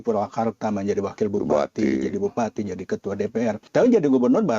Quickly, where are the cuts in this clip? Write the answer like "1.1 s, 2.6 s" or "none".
3.6 s